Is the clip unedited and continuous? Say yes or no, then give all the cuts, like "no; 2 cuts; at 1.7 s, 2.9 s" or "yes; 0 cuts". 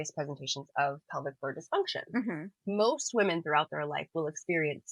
yes; 0 cuts